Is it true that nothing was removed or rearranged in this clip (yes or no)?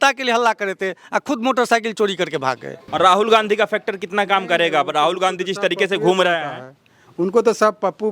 no